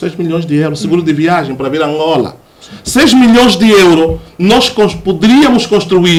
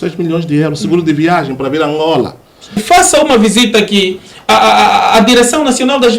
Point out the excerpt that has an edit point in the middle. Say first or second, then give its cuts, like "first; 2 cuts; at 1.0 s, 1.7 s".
second; 1 cut; at 2.8 s